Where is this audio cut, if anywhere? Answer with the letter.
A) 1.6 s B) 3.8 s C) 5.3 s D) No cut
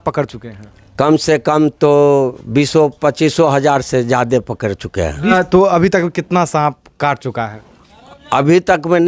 C